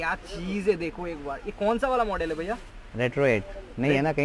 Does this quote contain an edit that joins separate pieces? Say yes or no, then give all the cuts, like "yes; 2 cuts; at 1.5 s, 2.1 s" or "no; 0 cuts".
no; 0 cuts